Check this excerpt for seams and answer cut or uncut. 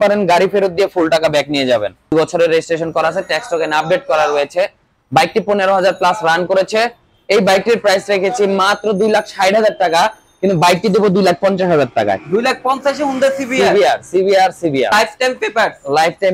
cut